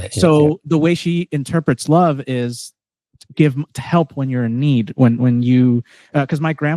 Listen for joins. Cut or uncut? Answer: uncut